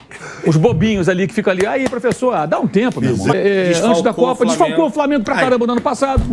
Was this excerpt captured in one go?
no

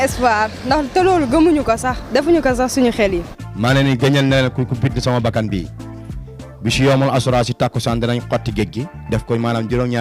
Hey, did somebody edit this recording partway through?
yes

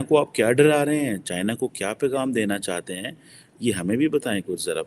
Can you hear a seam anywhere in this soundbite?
no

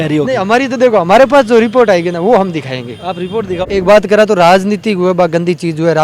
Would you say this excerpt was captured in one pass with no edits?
no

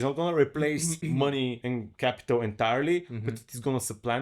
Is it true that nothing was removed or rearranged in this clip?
no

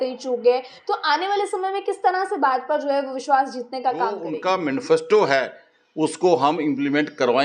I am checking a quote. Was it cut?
yes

